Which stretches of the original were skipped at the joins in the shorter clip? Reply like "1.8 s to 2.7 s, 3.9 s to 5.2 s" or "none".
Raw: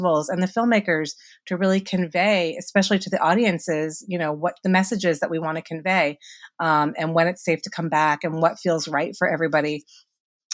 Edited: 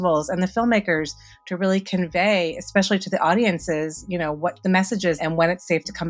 5.2 s to 6.9 s